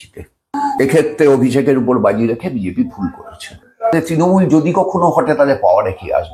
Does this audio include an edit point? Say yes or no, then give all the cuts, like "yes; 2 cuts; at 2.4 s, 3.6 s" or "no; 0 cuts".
yes; 2 cuts; at 0.8 s, 3.9 s